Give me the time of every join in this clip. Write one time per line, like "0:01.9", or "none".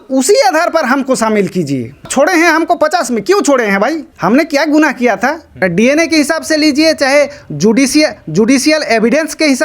0:02.0
0:04.1
0:05.6